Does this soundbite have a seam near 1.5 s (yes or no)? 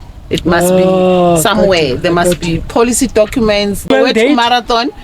no